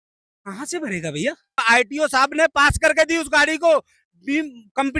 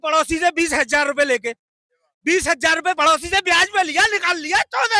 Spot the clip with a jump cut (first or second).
first